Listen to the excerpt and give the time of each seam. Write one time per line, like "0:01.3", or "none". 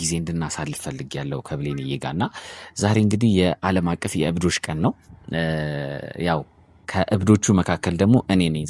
none